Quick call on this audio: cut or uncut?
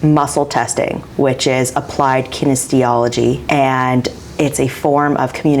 cut